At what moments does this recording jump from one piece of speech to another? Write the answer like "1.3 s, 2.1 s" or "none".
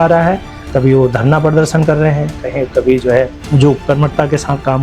3.4 s